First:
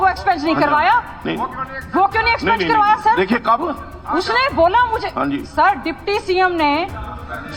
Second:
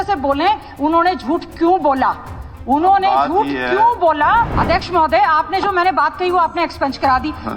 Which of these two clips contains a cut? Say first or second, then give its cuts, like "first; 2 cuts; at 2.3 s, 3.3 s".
second; 1 cut; at 4.5 s